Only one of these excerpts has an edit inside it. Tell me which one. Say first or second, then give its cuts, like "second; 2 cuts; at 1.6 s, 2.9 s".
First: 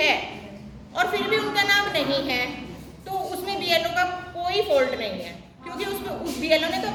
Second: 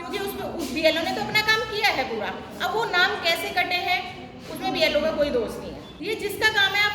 second; 1 cut; at 5.9 s